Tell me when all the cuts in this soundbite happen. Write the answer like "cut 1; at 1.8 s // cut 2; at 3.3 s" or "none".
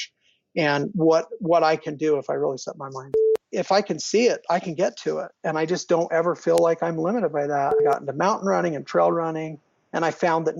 cut 1; at 3.1 s // cut 2; at 7.8 s